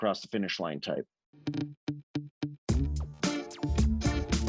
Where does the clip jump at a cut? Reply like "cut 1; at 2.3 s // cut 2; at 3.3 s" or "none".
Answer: cut 1; at 1.2 s

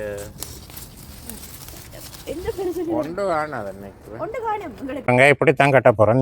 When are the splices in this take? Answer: cut 1; at 5.0 s

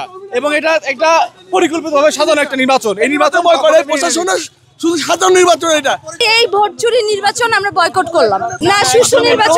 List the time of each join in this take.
cut 1; at 6.2 s // cut 2; at 8.6 s

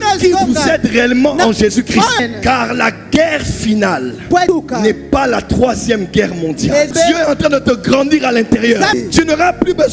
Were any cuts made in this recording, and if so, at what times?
cut 1; at 6.9 s // cut 2; at 8.9 s

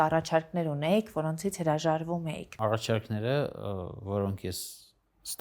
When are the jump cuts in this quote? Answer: cut 1; at 2.4 s

